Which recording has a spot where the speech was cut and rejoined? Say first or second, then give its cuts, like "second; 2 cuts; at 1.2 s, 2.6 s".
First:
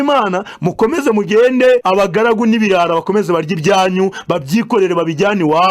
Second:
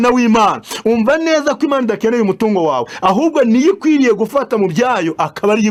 first; 1 cut; at 1.8 s